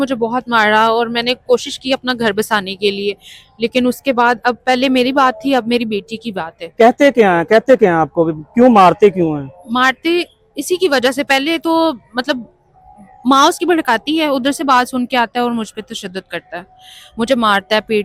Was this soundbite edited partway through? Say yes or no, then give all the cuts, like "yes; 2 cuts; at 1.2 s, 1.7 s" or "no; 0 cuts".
no; 0 cuts